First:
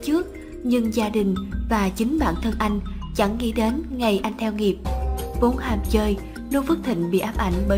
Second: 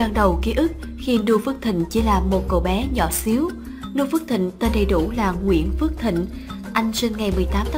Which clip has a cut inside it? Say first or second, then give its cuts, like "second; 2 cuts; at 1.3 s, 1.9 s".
first; 1 cut; at 0.9 s